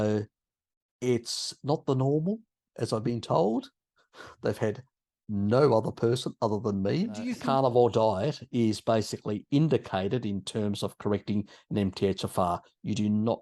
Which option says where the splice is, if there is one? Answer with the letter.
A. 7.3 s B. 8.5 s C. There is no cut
A